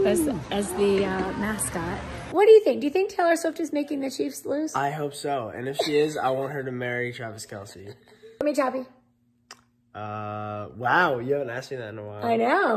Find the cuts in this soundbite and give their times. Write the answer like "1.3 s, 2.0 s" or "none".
2.2 s, 8.4 s